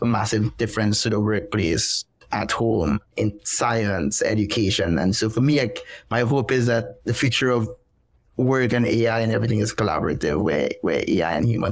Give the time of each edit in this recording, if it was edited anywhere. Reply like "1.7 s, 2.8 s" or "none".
none